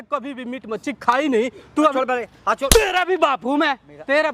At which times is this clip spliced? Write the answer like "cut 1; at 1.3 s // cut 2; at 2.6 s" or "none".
cut 1; at 1.9 s